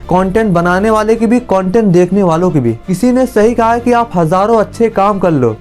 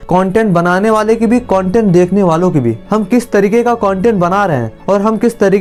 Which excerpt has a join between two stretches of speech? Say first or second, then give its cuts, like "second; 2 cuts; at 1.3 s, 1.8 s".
first; 1 cut; at 2.8 s